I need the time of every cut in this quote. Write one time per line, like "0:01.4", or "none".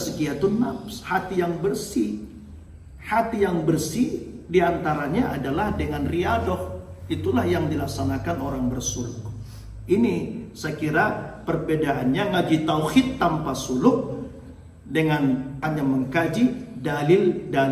0:15.6